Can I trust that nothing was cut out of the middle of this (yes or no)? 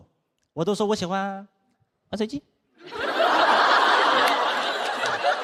yes